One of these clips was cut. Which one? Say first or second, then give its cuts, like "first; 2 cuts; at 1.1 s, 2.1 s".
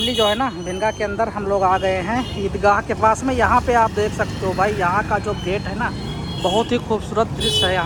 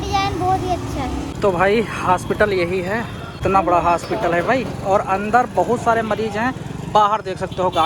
second; 2 cuts; at 1.3 s, 3.4 s